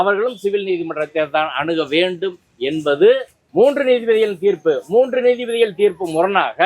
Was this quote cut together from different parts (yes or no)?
yes